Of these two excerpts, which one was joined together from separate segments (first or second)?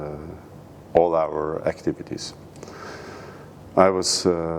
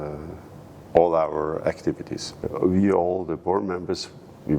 second